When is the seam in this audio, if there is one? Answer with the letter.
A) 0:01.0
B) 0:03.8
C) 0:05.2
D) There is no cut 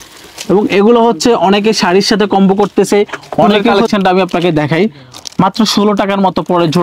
B